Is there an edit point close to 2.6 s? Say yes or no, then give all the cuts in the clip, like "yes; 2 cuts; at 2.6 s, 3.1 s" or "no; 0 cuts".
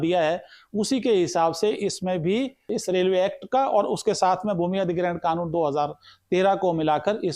yes; 1 cut; at 2.6 s